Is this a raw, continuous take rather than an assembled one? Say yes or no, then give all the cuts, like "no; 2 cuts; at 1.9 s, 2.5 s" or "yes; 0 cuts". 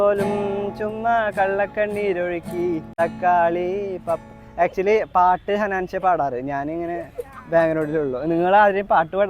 no; 1 cut; at 2.8 s